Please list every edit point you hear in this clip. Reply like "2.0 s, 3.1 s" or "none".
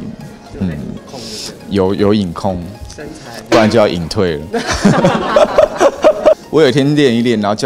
6.4 s